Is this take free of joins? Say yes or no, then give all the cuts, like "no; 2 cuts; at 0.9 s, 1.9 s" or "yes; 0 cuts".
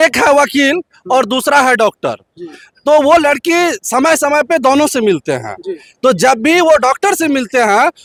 yes; 0 cuts